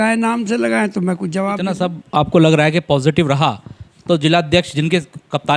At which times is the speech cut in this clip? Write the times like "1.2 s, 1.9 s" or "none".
1.9 s

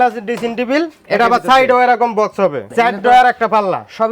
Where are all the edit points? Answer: 2.6 s

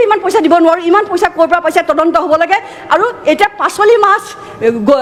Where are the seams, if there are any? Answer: none

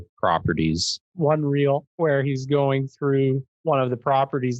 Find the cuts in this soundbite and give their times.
1.1 s, 1.9 s, 3.5 s

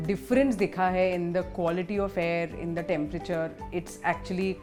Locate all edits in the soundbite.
none

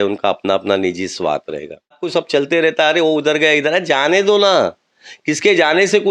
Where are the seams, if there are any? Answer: 2.0 s

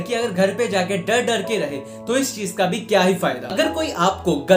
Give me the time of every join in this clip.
3.5 s

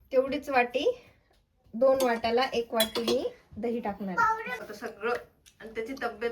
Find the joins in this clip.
4.6 s

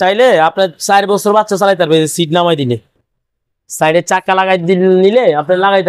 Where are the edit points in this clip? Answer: none

